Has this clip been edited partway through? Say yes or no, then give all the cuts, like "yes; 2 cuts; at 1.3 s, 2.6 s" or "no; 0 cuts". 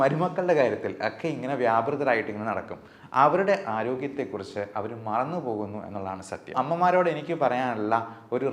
yes; 1 cut; at 6.5 s